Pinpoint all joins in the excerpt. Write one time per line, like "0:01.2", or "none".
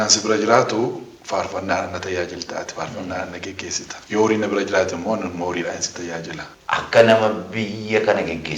0:03.9
0:06.5